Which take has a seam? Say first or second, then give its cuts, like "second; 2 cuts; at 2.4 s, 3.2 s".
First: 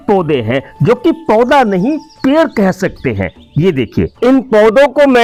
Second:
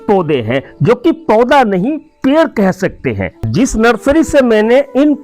second; 1 cut; at 3.3 s